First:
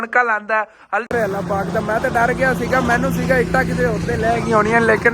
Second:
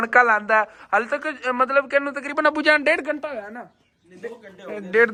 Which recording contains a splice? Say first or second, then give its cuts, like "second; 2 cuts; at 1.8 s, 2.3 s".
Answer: first; 1 cut; at 1.1 s